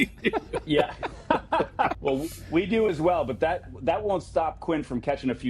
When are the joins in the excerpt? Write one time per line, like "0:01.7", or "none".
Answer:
0:01.9